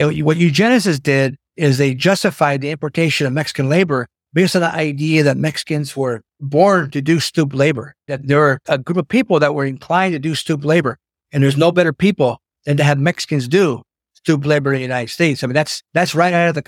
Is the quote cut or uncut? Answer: cut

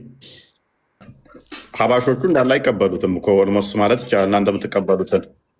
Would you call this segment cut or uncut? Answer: cut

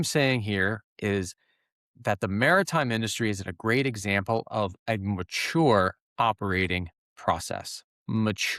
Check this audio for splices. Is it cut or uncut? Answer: uncut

